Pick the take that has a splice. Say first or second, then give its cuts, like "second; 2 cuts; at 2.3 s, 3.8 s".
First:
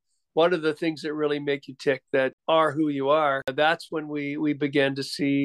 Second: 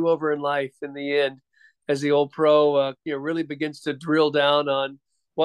first; 2 cuts; at 2.4 s, 3.5 s